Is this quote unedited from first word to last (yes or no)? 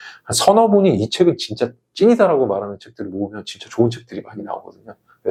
yes